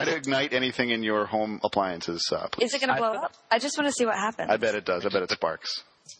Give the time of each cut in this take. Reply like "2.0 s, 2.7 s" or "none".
3.4 s